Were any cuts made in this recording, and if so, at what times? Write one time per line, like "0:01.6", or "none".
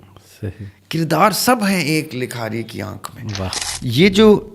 0:03.6